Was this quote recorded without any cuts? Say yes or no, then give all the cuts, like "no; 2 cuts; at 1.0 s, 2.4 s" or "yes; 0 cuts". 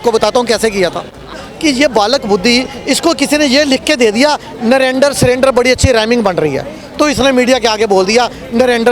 no; 1 cut; at 1.4 s